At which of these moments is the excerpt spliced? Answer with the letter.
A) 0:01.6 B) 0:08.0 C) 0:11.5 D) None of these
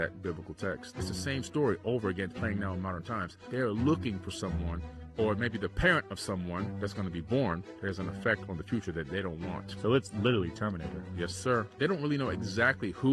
D